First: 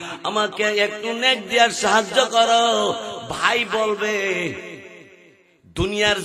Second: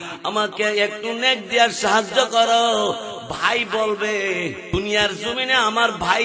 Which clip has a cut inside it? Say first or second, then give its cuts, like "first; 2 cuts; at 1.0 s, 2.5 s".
second; 1 cut; at 4.6 s